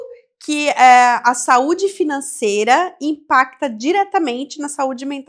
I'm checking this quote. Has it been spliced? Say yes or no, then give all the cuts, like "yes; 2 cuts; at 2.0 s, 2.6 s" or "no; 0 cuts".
no; 0 cuts